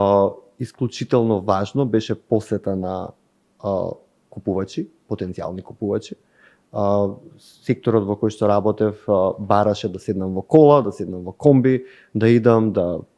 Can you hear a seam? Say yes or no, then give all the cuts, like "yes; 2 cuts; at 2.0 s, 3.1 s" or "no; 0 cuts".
no; 0 cuts